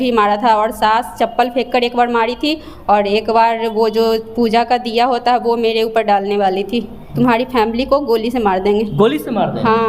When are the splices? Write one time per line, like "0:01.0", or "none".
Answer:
0:07.0